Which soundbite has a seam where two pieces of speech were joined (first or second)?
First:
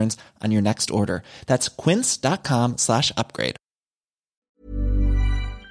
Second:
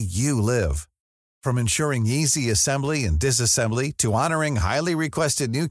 first